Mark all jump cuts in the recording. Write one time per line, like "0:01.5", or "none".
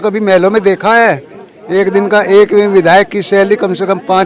0:01.5